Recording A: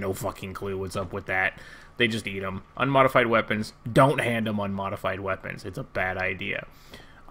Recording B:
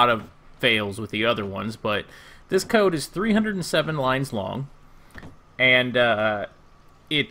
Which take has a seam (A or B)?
A